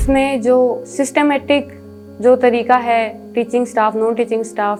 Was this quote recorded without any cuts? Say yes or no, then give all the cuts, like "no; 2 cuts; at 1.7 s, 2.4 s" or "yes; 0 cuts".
yes; 0 cuts